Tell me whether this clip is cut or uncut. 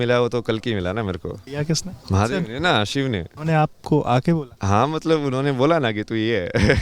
cut